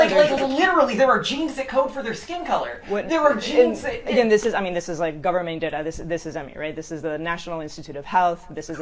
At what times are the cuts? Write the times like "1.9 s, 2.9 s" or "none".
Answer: 7.0 s